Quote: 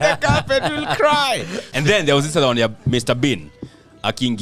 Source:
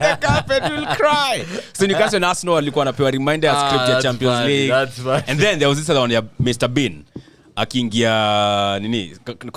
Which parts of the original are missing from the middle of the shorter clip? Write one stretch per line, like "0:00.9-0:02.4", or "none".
0:01.7-0:05.2